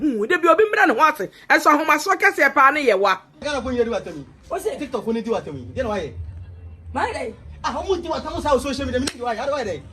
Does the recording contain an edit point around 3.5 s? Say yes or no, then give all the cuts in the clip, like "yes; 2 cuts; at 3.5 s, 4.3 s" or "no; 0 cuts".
yes; 1 cut; at 3.5 s